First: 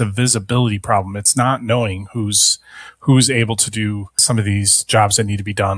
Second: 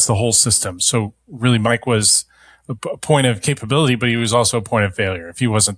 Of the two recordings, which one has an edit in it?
first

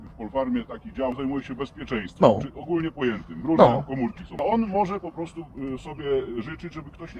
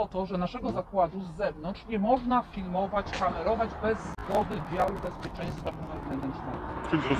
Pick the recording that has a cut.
first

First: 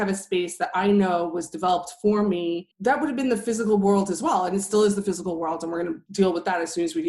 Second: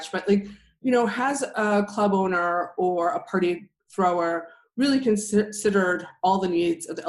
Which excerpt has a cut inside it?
first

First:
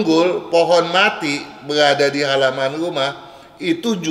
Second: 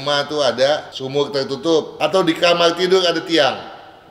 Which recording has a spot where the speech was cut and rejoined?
second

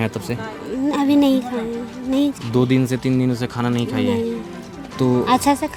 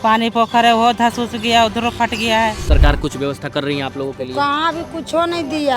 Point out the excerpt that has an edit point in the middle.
second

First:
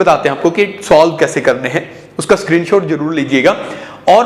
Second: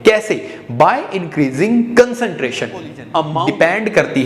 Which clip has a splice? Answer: second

